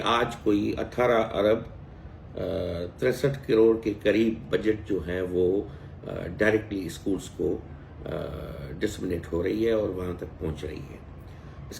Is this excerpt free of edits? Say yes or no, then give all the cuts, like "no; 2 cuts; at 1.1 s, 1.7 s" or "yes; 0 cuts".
yes; 0 cuts